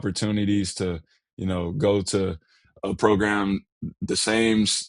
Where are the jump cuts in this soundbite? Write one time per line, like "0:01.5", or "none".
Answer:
none

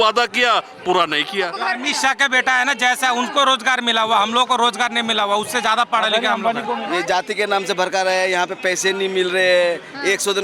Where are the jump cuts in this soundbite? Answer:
0:01.7
0:06.8

